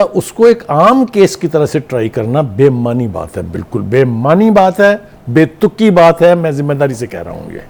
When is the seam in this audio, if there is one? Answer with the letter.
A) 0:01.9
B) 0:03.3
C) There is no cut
C